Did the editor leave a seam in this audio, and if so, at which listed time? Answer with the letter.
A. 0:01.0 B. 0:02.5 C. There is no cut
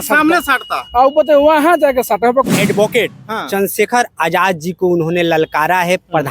B